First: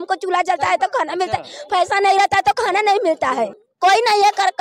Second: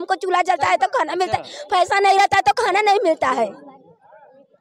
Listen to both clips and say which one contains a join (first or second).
first